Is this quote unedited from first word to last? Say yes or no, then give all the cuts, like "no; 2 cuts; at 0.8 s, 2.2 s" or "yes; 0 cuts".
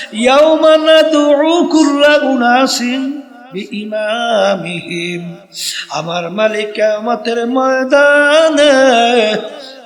yes; 0 cuts